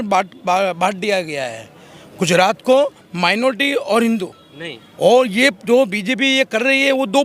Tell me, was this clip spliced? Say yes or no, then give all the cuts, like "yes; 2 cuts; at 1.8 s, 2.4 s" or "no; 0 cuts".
no; 0 cuts